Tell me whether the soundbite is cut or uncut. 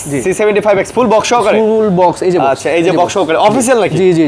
uncut